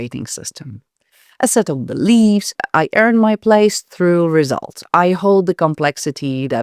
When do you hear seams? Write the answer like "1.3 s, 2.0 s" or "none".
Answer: 2.6 s